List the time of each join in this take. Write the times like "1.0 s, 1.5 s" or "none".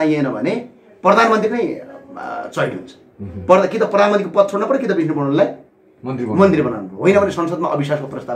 none